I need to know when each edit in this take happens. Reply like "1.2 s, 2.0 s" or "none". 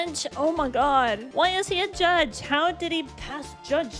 1.2 s